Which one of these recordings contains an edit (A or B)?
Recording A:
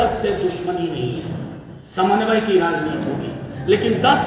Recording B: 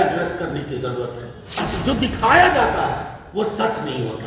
B